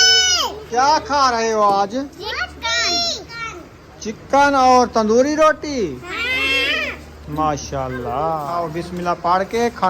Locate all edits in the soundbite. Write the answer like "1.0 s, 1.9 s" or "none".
8.5 s

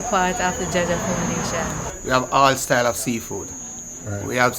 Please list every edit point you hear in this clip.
1.9 s

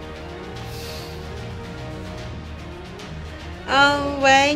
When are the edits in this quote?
3.7 s

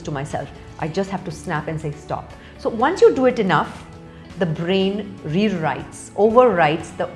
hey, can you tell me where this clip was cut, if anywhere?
none

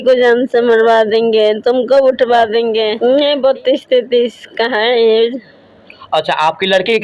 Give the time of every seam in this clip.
2.9 s

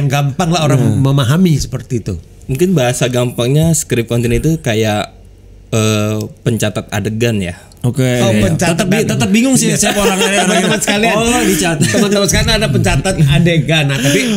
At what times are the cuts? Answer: none

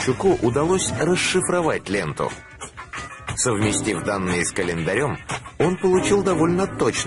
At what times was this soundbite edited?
5.5 s

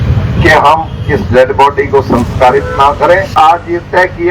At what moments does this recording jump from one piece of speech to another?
3.3 s

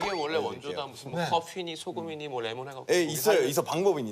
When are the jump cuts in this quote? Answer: 2.7 s

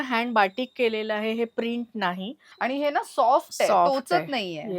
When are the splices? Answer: 2.4 s

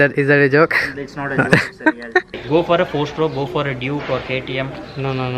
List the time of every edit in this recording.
2.4 s

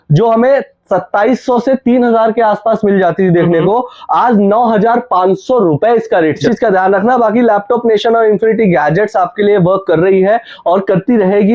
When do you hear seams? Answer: 6.4 s

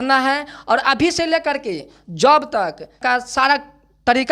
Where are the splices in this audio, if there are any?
3.0 s

